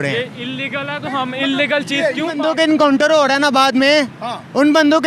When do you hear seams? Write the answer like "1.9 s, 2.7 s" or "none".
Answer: 2.4 s